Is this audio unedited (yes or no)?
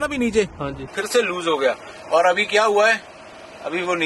no